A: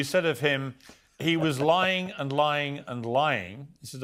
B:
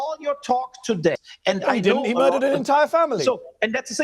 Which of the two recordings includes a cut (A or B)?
B